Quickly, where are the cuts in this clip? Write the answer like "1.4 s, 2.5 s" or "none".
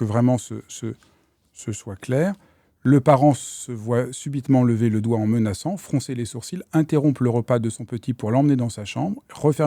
none